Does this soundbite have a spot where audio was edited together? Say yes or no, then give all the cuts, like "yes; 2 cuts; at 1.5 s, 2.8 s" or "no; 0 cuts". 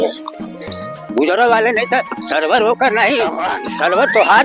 no; 0 cuts